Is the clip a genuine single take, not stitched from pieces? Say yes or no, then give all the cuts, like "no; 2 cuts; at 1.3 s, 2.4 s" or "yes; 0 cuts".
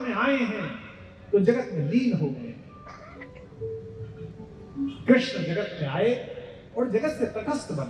yes; 0 cuts